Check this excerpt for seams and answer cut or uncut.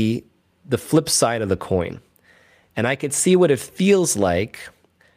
uncut